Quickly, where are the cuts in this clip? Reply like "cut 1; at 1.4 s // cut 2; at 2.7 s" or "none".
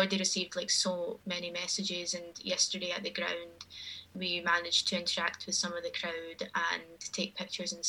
cut 1; at 4.0 s

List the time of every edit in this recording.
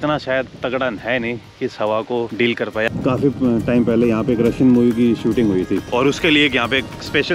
cut 1; at 2.6 s // cut 2; at 5.9 s

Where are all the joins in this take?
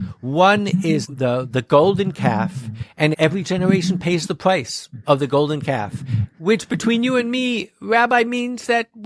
cut 1; at 1.1 s // cut 2; at 3.1 s

